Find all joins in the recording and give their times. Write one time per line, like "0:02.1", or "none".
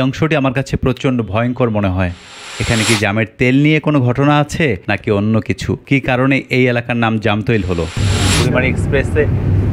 0:02.6
0:08.0